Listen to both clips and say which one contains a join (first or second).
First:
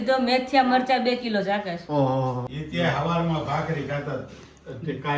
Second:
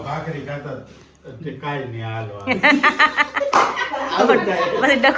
first